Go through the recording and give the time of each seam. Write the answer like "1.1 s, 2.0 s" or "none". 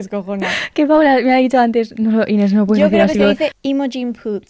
3.6 s